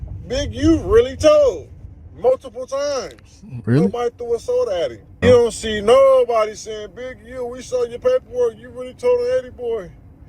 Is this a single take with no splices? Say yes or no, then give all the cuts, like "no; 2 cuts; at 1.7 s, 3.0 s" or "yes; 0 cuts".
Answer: no; 1 cut; at 5.2 s